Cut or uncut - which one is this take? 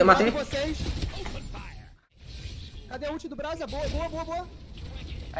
cut